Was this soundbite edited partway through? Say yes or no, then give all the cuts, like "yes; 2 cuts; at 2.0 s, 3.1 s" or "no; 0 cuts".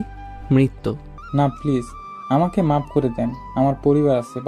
yes; 1 cut; at 1.1 s